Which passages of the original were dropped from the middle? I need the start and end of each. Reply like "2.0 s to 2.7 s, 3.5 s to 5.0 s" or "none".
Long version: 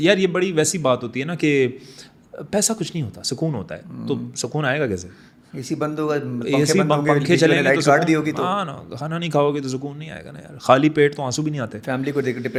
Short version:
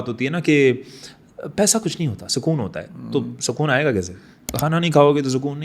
5.4 s to 8.8 s